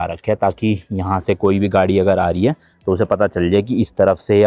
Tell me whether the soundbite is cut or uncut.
uncut